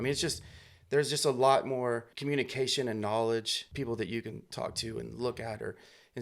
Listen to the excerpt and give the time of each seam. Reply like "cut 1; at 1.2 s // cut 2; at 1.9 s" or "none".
cut 1; at 2.1 s // cut 2; at 3.6 s